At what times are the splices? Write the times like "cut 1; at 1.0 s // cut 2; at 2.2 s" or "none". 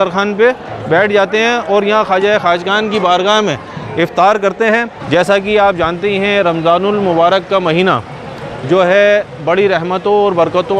cut 1; at 4.9 s